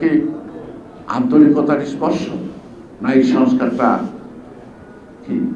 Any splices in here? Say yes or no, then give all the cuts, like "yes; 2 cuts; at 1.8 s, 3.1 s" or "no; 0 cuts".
no; 0 cuts